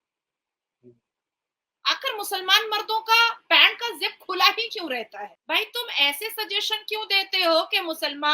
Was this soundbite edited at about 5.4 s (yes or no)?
yes